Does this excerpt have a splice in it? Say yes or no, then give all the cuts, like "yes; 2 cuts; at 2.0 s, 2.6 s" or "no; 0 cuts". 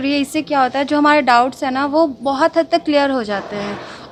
no; 0 cuts